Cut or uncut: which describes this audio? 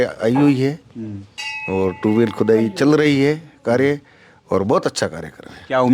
uncut